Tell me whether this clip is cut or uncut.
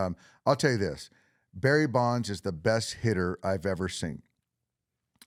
uncut